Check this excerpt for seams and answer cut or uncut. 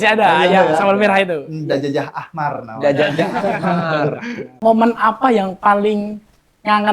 cut